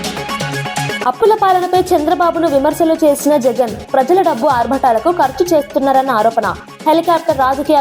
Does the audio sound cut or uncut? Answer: cut